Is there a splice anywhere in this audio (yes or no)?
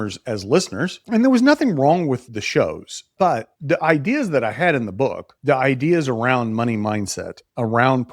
yes